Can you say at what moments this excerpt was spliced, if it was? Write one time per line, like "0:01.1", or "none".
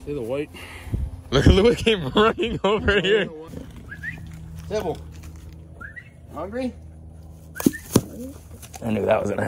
0:03.4